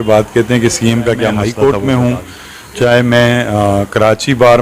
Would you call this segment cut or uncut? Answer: cut